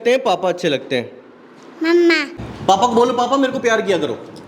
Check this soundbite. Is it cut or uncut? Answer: cut